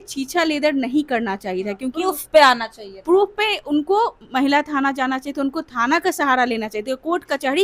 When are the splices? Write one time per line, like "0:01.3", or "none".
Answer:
none